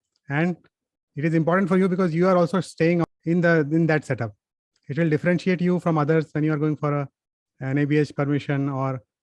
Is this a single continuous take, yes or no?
no